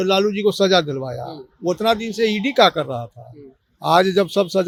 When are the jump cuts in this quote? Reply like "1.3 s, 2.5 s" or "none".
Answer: none